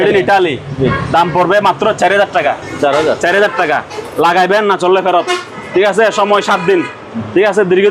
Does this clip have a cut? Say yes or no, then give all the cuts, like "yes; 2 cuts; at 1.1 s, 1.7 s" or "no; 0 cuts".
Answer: no; 0 cuts